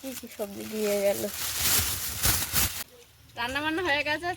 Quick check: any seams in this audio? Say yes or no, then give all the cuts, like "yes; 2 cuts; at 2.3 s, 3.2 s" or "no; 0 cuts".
yes; 1 cut; at 2.8 s